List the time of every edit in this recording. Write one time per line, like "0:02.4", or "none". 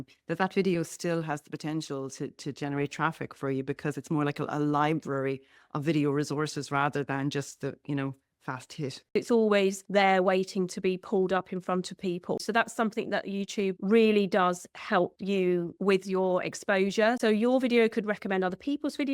0:09.1
0:12.4
0:17.2